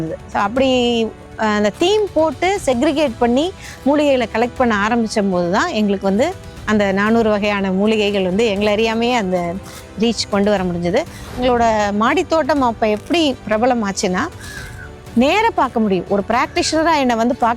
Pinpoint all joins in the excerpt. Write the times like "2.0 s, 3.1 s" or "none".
11.4 s